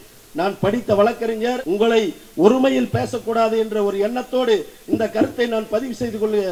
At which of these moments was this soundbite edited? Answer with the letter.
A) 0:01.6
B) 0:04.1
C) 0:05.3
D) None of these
A